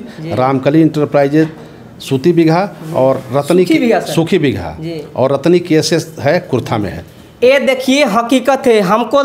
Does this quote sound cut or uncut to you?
uncut